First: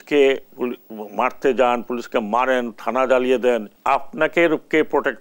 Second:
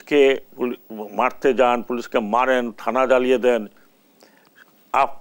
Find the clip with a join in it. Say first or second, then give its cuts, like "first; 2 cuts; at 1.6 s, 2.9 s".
first; 1 cut; at 3.7 s